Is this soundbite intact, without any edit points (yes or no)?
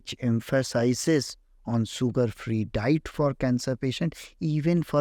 yes